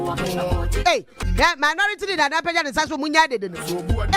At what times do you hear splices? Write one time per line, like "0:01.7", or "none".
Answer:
0:01.1